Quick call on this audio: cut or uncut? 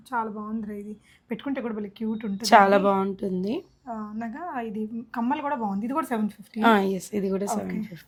uncut